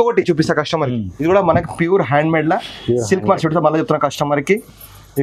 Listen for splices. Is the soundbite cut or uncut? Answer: cut